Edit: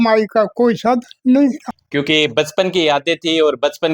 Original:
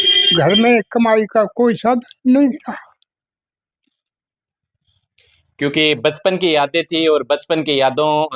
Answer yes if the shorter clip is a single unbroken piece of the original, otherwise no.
no